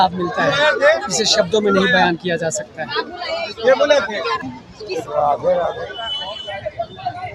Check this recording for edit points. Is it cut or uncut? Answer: uncut